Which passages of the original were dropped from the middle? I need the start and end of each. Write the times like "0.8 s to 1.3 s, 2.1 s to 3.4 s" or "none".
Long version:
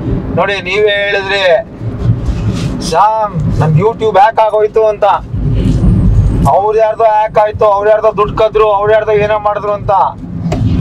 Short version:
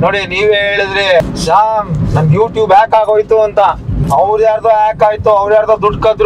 1.6 s to 2.7 s, 5.4 s to 6.3 s

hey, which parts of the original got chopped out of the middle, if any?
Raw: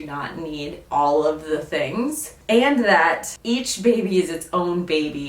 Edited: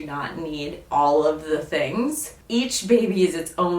2.3 s to 3.3 s

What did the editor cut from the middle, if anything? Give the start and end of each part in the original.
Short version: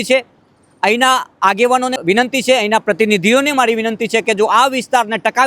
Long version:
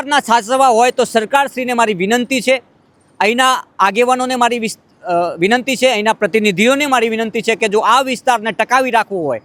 4.3 s to 5.3 s

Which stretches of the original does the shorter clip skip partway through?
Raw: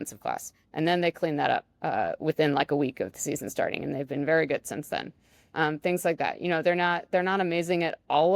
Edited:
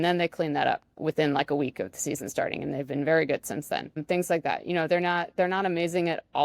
1.8 s to 2.1 s, 5.2 s to 5.8 s

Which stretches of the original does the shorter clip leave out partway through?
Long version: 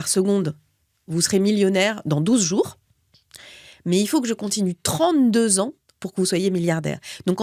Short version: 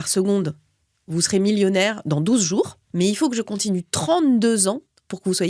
2.8 s to 3.7 s

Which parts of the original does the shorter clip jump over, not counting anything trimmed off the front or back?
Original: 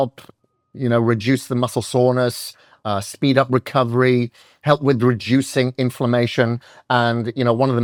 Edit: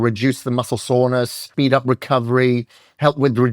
2.5 s to 3.1 s

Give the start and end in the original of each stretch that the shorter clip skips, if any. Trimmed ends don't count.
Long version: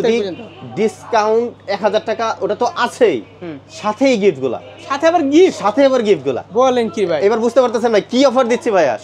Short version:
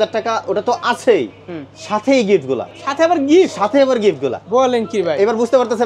4.7 s to 4.8 s

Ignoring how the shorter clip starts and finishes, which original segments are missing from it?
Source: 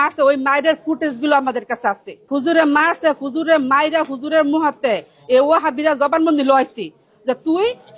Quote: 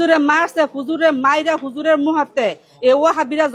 none

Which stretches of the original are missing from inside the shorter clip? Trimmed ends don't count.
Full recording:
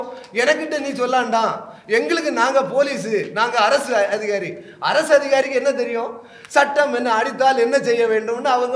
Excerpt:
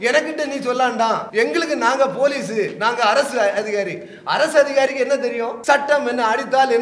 1.6 s to 1.8 s, 6.1 s to 6.4 s

